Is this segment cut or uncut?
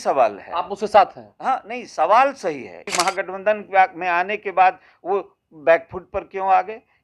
cut